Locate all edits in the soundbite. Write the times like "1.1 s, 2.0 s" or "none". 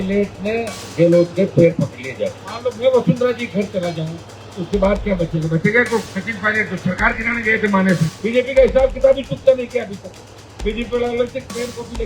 2.5 s, 6.1 s, 8.1 s